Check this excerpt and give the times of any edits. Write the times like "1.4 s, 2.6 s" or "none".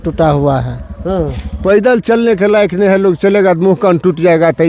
1.4 s